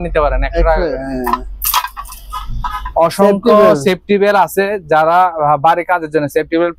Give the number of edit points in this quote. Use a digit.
0